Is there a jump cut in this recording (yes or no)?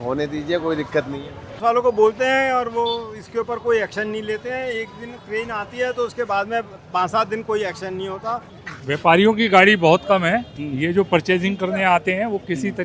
yes